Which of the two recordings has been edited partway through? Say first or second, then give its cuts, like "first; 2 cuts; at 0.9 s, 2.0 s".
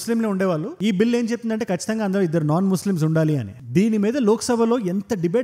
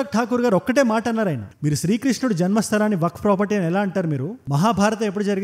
first; 1 cut; at 3.5 s